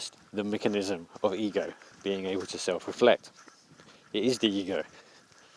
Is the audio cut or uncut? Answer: cut